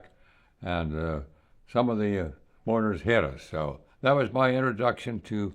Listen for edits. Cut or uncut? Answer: cut